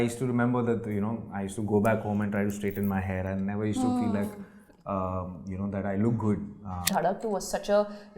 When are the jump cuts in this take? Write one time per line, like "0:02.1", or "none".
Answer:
0:06.8